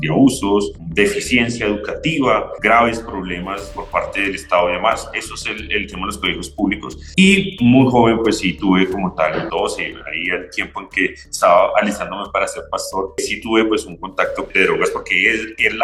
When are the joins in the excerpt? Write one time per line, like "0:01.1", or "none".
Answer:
0:14.5